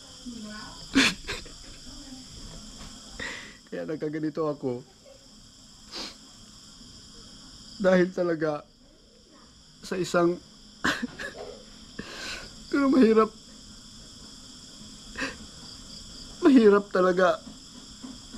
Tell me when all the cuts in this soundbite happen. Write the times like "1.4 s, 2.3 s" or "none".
none